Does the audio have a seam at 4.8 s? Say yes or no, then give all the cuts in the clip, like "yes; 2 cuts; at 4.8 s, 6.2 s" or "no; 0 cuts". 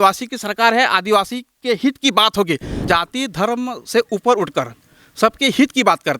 no; 1 cut; at 2.8 s